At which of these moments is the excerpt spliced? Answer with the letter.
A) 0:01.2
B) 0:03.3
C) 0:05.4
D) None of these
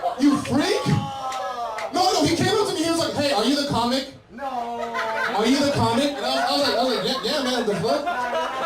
D